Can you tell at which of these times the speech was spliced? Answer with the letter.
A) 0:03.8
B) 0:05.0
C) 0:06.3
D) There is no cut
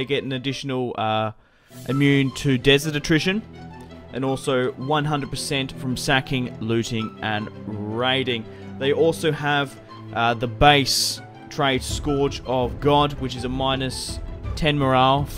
B